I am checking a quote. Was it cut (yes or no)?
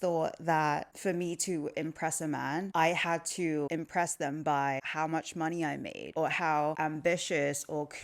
yes